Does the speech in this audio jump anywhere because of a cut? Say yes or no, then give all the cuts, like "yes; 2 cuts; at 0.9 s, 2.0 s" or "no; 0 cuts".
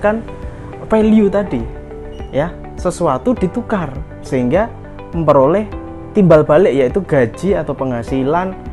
no; 0 cuts